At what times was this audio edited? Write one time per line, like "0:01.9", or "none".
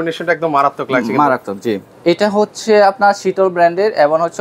0:01.9